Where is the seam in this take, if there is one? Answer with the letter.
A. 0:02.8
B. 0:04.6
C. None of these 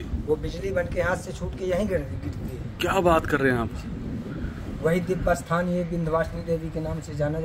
C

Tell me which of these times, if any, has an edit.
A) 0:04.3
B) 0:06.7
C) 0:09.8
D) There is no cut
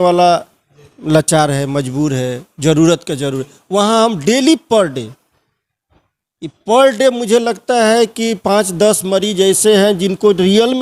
D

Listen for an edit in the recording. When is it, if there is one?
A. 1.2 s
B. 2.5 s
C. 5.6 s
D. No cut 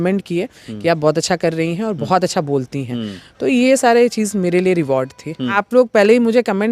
C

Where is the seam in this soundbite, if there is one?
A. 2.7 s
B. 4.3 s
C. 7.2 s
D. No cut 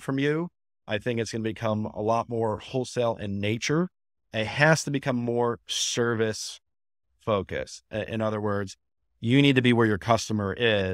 B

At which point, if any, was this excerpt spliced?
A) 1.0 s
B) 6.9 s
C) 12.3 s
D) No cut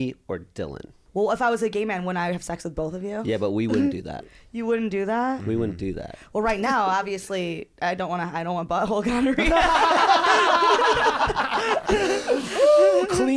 A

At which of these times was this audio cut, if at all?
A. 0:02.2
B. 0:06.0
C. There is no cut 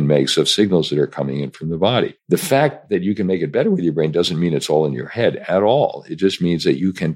A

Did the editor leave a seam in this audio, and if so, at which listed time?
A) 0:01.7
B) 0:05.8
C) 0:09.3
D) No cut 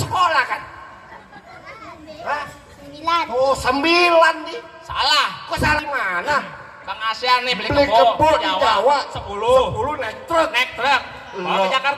B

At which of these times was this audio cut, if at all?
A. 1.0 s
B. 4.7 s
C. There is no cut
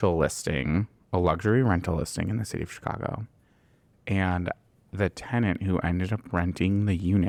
C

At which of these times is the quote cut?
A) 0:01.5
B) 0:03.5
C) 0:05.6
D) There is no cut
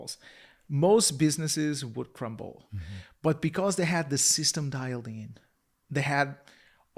D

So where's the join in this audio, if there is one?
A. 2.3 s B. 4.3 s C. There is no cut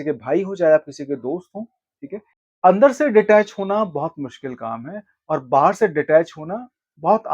A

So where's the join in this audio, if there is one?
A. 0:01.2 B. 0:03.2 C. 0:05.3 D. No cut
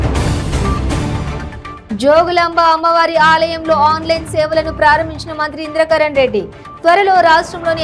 A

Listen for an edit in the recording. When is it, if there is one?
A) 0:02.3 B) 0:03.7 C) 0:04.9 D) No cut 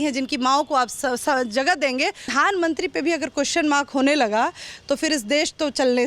A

